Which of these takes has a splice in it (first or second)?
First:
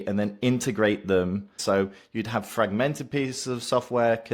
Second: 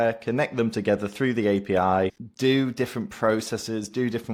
first